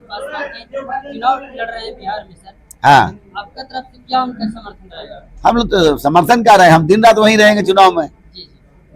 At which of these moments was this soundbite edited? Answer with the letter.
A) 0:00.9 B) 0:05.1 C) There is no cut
C